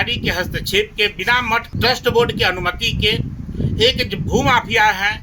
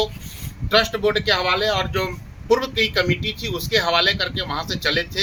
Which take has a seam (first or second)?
first